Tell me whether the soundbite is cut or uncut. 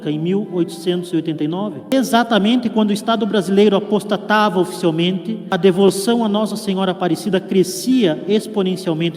cut